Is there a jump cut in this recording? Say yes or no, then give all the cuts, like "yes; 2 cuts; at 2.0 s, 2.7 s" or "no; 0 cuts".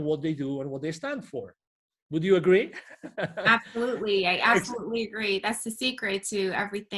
no; 0 cuts